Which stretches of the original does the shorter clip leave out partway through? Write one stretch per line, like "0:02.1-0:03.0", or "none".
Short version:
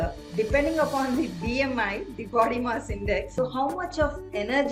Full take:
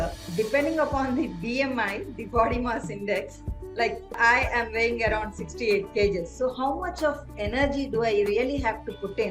0:03.3-0:06.3